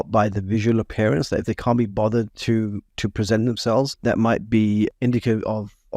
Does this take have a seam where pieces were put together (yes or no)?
yes